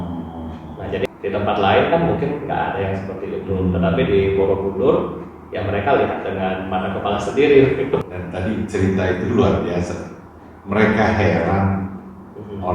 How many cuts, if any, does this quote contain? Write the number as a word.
two